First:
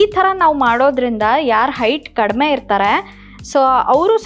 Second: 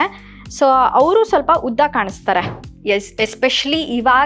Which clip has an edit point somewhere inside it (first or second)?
second